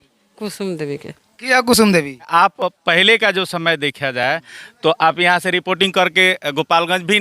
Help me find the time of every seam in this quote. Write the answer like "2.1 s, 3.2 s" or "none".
2.3 s